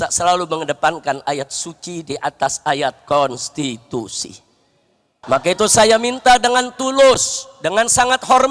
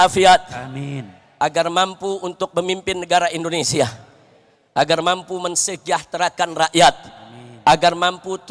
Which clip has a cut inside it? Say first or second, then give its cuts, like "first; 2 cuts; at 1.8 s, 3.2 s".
first; 1 cut; at 5.1 s